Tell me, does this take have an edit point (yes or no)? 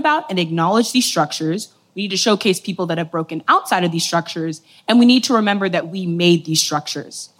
no